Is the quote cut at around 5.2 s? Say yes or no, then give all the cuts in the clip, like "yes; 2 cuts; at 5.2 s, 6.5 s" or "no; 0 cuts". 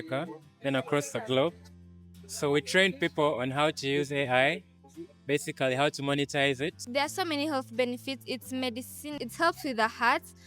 no; 2 cuts; at 6.8 s, 9.1 s